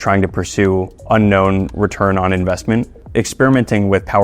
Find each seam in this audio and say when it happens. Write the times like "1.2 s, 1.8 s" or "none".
3.0 s